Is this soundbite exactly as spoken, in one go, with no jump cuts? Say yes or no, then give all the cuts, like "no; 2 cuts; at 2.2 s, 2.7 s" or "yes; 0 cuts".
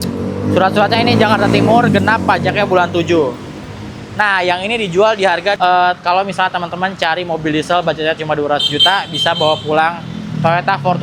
no; 1 cut; at 5.6 s